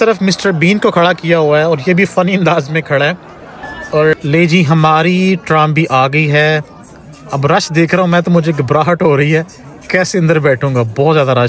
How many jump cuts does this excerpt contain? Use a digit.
1